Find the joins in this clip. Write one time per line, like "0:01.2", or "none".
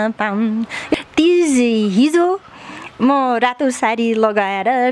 0:00.9